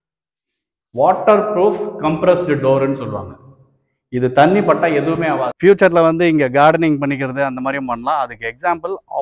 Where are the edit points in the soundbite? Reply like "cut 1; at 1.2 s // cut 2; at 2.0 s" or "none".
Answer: cut 1; at 5.5 s